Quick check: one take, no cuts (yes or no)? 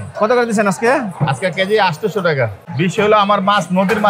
no